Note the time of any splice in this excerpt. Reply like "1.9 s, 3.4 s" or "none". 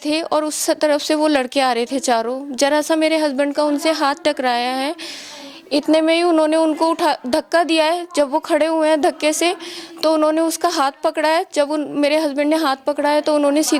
none